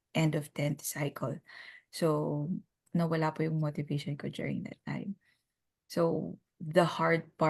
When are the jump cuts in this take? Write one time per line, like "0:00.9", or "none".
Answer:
0:02.8